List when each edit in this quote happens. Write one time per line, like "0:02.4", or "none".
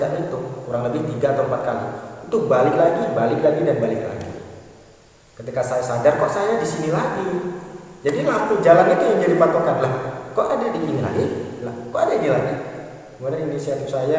none

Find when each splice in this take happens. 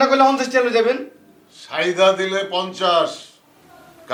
none

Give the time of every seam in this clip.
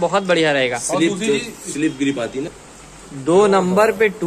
0:02.5

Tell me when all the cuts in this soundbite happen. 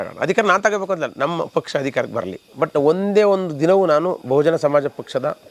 0:02.4

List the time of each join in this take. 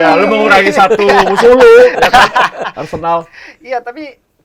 none

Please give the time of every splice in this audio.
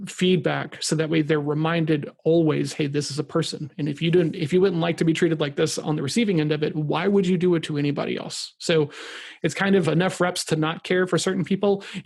none

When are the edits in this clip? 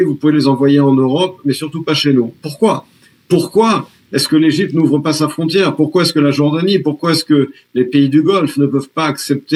none

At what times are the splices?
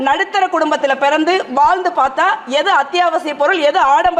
none

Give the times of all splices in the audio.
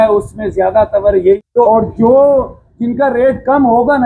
0:01.4

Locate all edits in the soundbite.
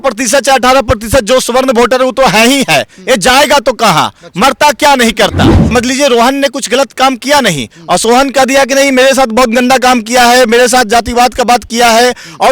0:05.7

